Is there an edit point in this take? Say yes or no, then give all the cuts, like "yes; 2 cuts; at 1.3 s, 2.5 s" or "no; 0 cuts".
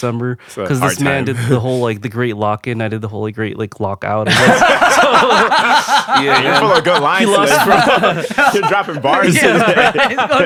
no; 0 cuts